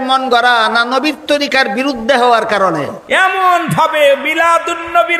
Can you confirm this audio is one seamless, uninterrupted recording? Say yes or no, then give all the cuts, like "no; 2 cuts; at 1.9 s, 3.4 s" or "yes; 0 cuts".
no; 1 cut; at 3.0 s